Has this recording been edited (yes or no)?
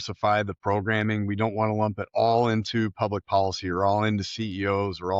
no